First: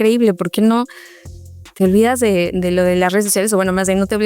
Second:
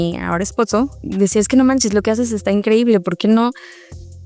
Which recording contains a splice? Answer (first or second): second